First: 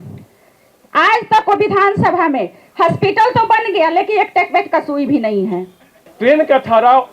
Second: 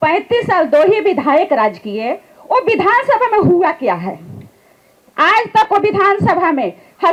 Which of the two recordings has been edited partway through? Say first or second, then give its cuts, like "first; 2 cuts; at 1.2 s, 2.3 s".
first; 1 cut; at 6.1 s